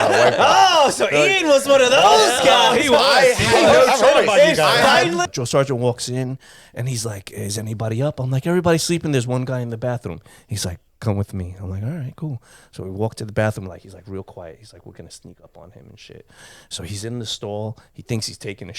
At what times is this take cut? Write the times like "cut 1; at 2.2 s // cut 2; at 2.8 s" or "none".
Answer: cut 1; at 5.3 s